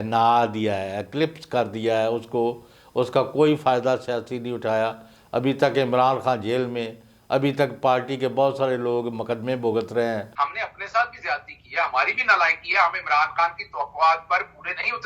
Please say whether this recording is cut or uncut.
cut